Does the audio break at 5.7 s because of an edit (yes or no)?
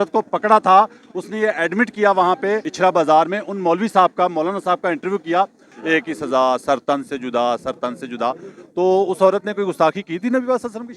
yes